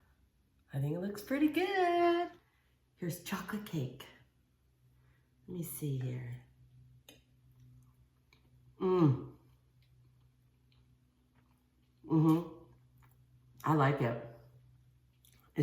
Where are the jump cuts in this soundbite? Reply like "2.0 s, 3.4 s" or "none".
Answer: 2.3 s